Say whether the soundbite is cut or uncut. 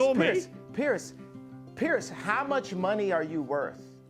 uncut